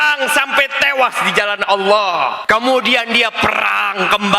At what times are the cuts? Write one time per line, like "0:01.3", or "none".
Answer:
0:02.4